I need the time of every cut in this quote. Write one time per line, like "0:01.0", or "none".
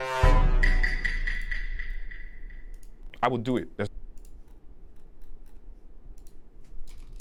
none